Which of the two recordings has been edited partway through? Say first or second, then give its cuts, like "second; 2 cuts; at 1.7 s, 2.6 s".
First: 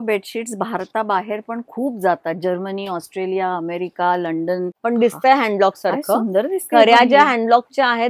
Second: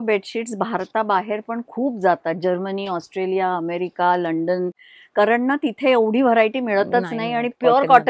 first; 1 cut; at 4.7 s